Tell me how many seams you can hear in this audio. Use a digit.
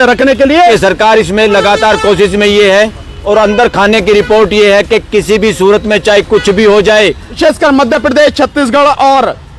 2